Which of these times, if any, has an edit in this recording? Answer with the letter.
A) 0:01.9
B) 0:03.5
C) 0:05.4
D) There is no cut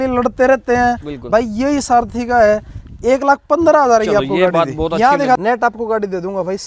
C